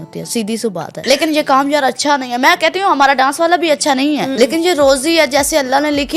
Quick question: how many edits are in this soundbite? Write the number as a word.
two